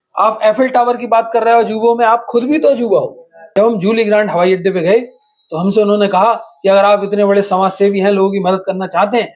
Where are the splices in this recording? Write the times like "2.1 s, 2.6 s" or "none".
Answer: 3.4 s